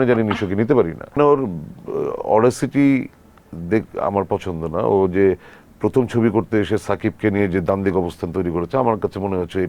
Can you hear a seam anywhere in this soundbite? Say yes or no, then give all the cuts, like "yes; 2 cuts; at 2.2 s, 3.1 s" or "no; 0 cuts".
yes; 1 cut; at 1.2 s